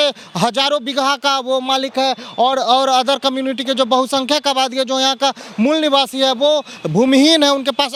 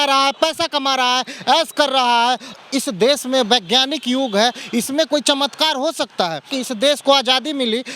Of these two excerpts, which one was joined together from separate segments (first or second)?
second